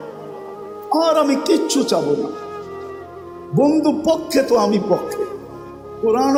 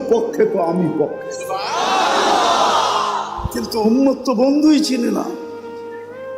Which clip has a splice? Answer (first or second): second